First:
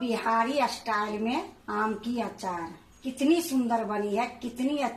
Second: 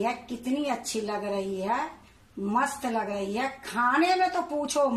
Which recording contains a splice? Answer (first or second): first